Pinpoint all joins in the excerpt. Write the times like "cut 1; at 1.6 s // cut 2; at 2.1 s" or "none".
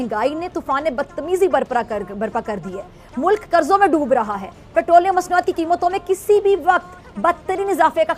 none

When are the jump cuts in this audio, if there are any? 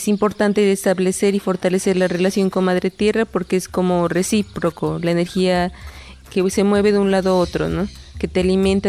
none

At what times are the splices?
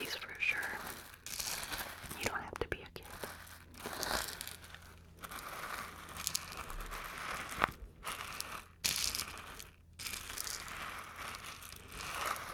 none

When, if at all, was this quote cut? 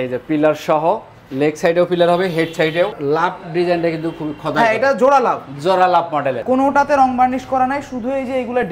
cut 1; at 3.0 s // cut 2; at 6.4 s

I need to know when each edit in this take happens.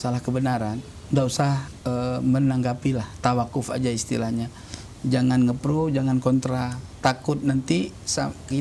cut 1; at 0.9 s // cut 2; at 1.7 s

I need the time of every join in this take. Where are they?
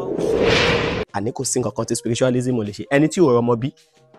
cut 1; at 1.1 s

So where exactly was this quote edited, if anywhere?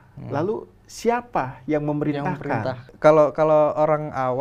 cut 1; at 2.9 s

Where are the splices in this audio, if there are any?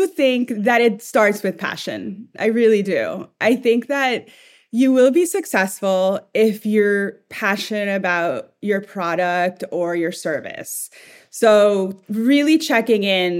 none

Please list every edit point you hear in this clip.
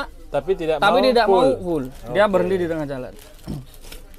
none

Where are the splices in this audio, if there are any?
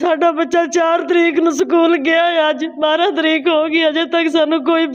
none

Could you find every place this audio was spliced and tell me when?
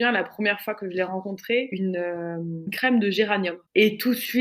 cut 1; at 1.7 s

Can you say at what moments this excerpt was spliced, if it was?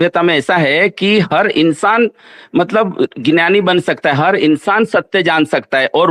none

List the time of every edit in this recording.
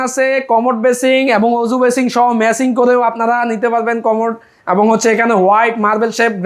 none

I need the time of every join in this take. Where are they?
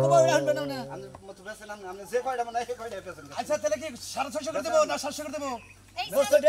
none

